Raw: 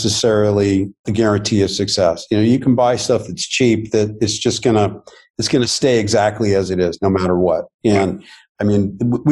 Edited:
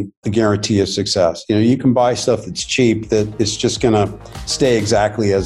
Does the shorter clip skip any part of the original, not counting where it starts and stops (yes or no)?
yes